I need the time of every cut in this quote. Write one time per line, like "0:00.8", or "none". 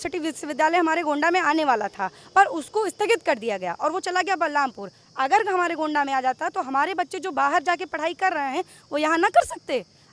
none